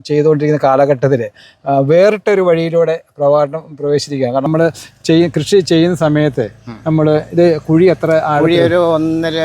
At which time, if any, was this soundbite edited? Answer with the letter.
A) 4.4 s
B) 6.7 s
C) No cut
A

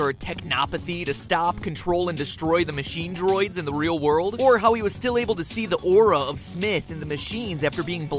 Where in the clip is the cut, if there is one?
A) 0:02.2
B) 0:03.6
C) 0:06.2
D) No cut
C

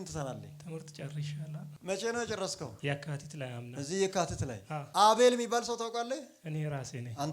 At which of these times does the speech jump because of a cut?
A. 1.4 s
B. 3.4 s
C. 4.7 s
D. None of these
C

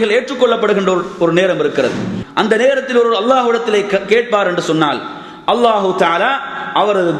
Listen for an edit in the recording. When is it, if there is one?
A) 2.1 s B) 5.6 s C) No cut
A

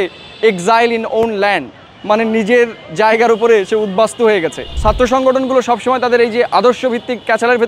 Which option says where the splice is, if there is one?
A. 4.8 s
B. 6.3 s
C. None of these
A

